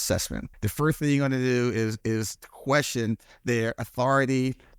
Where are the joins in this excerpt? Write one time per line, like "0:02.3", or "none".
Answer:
none